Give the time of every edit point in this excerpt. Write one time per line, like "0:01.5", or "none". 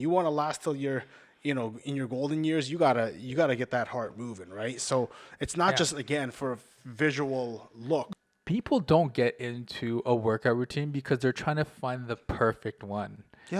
0:08.1